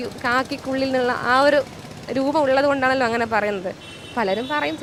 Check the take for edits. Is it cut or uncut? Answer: uncut